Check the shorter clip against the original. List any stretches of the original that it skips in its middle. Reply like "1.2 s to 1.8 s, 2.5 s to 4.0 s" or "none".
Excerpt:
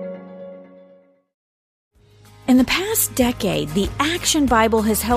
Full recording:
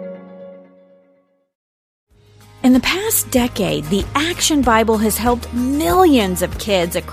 1.2 s to 1.4 s